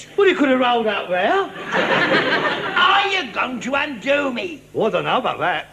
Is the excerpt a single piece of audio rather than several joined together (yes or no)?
yes